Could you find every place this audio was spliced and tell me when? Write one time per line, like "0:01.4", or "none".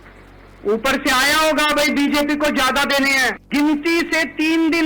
0:03.4

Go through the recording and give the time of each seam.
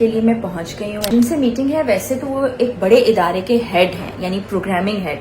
0:01.1

